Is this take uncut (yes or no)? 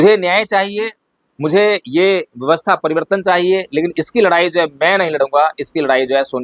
yes